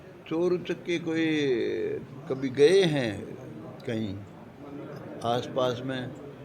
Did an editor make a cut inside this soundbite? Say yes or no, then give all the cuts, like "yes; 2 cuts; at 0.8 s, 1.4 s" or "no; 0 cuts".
no; 0 cuts